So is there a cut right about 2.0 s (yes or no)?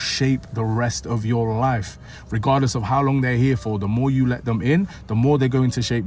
no